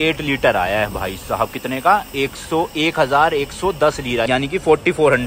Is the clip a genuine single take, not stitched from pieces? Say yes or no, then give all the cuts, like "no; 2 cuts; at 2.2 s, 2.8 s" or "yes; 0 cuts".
yes; 0 cuts